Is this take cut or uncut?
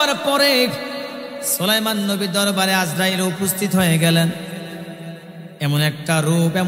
uncut